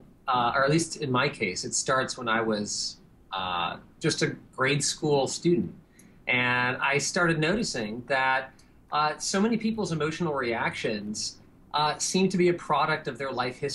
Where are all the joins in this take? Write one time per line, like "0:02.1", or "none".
0:08.5